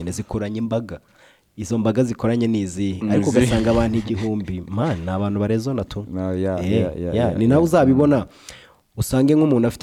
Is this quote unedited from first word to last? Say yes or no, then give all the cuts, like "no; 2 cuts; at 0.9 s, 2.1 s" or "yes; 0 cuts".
yes; 0 cuts